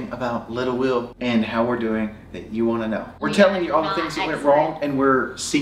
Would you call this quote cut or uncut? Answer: cut